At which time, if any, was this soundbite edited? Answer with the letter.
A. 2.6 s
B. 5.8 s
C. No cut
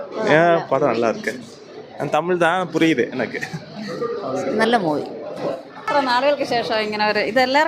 B